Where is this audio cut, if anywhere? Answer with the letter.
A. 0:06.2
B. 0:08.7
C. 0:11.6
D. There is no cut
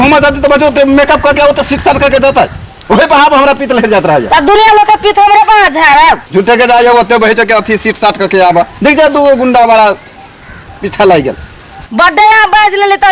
A